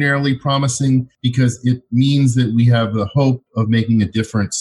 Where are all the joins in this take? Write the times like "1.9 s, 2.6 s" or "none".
1.2 s